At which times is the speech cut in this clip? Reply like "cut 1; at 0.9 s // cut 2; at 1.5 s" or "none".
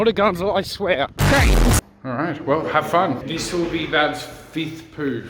cut 1; at 1.1 s // cut 2; at 1.9 s // cut 3; at 3.2 s

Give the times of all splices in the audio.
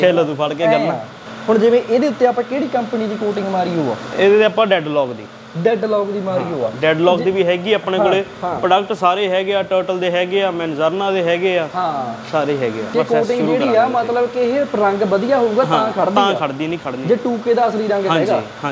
cut 1; at 1.3 s // cut 2; at 12.9 s

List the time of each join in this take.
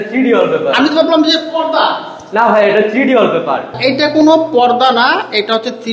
cut 1; at 3.7 s

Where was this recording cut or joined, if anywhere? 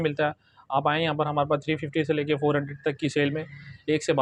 none

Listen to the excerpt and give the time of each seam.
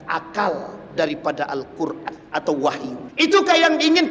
cut 1; at 2.1 s // cut 2; at 3.0 s

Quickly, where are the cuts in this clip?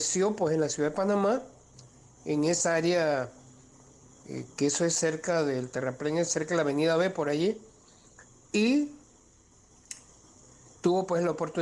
none

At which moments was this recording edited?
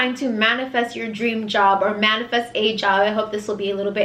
none

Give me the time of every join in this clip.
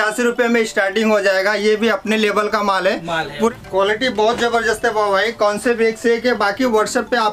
cut 1; at 3.5 s

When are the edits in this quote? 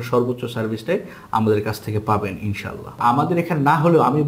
cut 1; at 3.0 s

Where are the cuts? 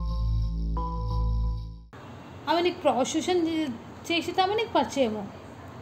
none

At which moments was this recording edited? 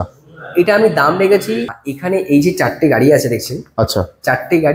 cut 1; at 1.8 s

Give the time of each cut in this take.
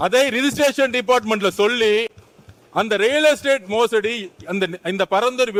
none

